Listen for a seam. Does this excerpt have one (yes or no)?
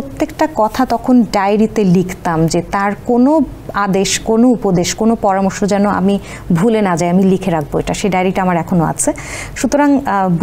no